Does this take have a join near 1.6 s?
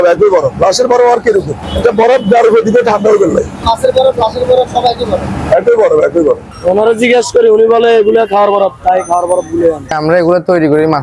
yes; 4 cuts; at 1.6 s, 3.6 s, 6.4 s, 9.8 s

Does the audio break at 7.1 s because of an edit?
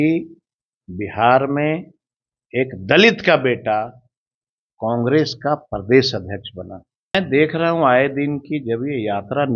yes; 1 cut; at 7.1 s

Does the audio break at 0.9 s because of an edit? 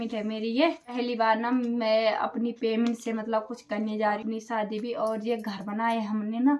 yes; 2 cuts; at 0.9 s, 4.2 s

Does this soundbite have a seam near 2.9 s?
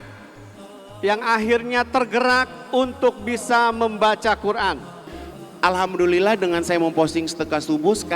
no; 1 cut; at 5.4 s

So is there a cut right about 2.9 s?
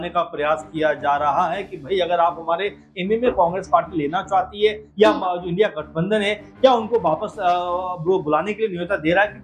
yes; 1 cut; at 2.9 s

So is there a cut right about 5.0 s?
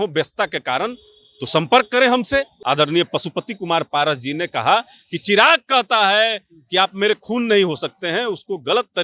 no; 1 cut; at 2.5 s

